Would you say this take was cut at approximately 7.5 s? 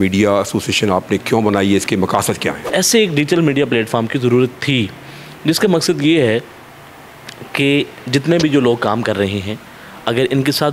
no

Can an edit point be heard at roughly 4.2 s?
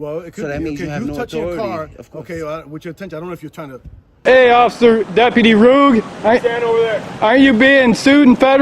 yes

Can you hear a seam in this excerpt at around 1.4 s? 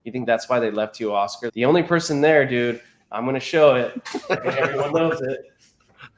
yes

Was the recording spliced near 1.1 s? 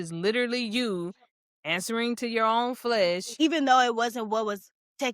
no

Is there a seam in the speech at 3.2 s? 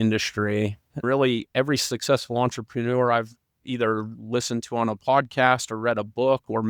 no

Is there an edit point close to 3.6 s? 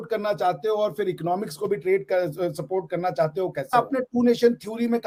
no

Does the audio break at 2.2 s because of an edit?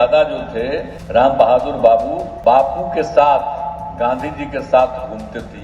yes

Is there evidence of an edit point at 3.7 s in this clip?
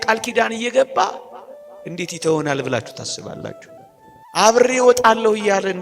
yes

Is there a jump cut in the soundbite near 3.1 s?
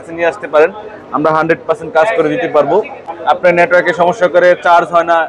yes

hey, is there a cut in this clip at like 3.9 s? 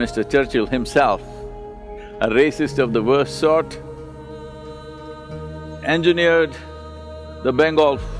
no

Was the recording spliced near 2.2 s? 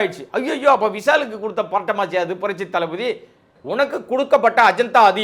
no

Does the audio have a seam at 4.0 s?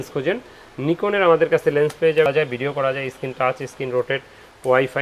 no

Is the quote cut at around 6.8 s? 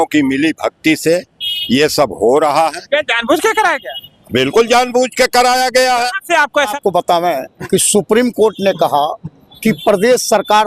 yes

